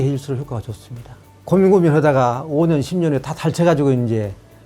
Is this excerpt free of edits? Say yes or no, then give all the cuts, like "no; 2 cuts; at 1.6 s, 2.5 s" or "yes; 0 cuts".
no; 1 cut; at 1.4 s